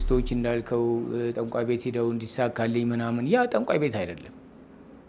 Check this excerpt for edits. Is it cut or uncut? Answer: uncut